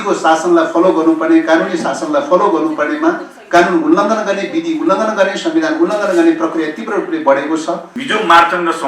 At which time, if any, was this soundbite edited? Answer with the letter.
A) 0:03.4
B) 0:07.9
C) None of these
B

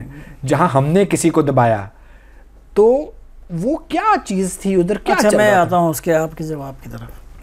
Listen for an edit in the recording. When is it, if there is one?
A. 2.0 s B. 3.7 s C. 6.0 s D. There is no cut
D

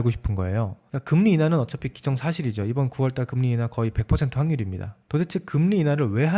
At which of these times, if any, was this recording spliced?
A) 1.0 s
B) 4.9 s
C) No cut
B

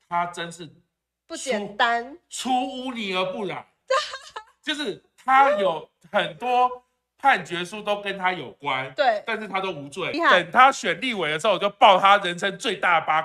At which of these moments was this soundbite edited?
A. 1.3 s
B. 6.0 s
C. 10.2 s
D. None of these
C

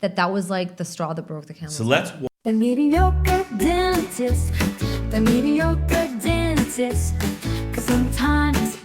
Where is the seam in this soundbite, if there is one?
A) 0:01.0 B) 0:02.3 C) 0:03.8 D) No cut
B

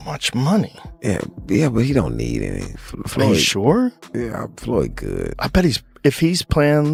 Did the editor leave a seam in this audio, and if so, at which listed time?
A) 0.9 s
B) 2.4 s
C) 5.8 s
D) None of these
D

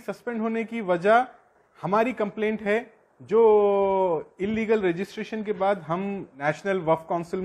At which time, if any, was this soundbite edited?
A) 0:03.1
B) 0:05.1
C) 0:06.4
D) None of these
C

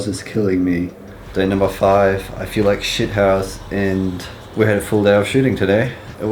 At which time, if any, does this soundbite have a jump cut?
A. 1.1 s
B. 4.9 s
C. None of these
A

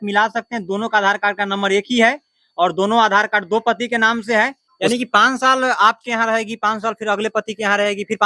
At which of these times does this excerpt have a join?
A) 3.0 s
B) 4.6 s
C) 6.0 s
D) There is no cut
B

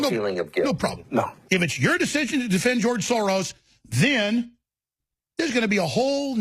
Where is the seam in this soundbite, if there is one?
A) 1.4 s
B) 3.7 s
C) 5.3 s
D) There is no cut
A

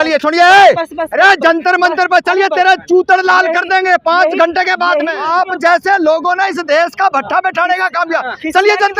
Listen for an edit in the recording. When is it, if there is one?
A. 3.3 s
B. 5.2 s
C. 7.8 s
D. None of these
B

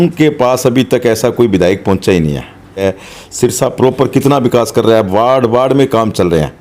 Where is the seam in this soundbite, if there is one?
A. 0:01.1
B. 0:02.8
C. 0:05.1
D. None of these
B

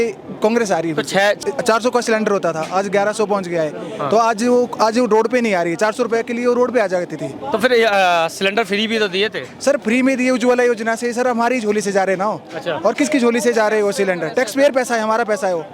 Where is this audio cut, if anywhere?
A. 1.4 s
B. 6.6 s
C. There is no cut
A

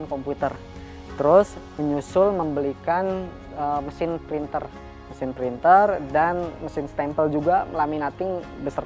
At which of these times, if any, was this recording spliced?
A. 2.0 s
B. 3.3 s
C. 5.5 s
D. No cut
D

